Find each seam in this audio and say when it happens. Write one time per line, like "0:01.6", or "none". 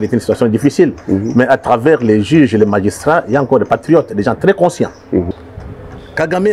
0:05.3